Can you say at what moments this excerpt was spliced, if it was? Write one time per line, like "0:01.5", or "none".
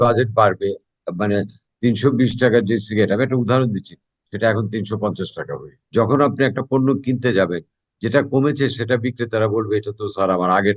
0:05.7